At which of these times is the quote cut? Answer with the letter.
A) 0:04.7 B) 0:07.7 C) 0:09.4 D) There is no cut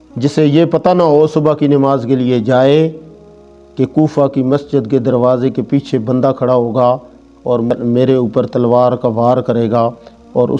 B